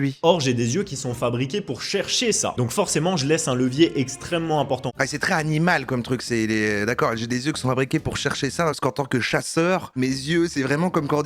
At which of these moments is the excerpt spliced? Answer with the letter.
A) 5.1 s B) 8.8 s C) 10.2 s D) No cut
B